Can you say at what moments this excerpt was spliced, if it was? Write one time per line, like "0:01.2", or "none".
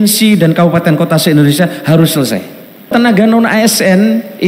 0:02.9